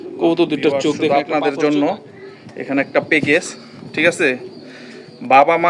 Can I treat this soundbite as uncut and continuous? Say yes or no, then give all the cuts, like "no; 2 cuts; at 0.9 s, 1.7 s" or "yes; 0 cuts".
no; 1 cut; at 1.1 s